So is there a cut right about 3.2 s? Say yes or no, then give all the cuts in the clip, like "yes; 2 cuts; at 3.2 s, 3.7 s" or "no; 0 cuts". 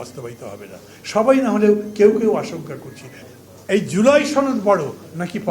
yes; 1 cut; at 3.2 s